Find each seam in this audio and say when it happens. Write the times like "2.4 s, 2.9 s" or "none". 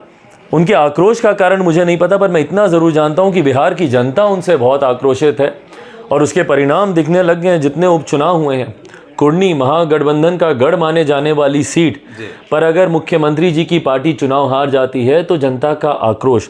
none